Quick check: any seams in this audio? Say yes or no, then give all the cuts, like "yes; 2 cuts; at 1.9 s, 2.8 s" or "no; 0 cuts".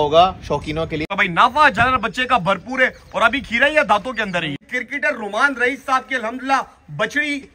yes; 2 cuts; at 1.1 s, 4.7 s